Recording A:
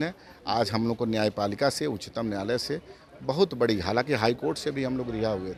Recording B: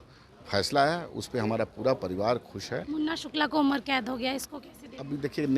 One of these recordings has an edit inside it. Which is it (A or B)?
B